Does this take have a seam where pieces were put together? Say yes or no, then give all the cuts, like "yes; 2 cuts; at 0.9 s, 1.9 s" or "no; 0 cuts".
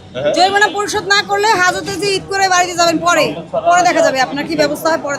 no; 0 cuts